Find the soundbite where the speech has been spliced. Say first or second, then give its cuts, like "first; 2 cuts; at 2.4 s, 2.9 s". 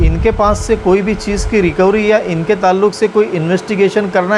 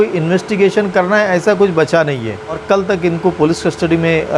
second; 1 cut; at 2.6 s